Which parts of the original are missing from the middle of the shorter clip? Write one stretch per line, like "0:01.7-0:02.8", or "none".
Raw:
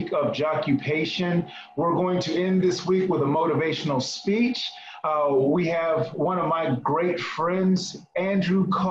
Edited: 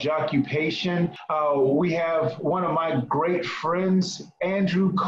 0:01.5-0:04.9